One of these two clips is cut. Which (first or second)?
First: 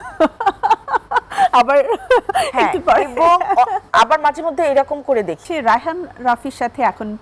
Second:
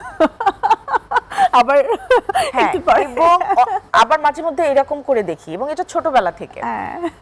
first